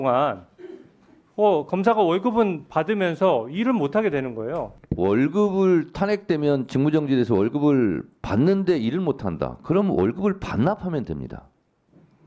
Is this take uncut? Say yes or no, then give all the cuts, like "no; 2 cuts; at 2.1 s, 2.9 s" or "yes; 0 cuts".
no; 1 cut; at 4.8 s